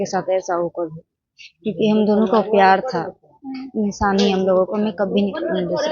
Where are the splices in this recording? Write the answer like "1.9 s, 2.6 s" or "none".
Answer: none